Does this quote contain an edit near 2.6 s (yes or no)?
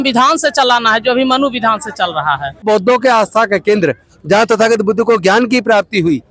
yes